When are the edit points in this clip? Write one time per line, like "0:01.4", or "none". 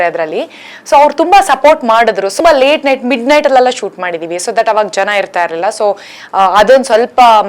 0:02.3